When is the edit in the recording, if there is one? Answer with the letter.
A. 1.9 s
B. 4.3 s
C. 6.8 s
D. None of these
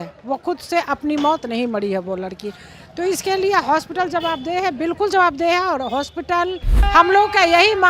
C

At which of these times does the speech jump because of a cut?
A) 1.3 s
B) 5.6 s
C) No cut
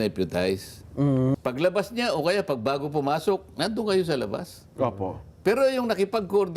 A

